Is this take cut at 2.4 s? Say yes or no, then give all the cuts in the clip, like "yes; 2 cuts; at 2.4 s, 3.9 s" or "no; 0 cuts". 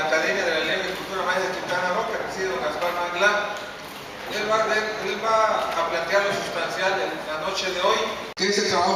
yes; 1 cut; at 2.4 s